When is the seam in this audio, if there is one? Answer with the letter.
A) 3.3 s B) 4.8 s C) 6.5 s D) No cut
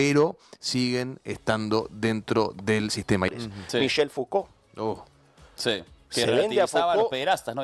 A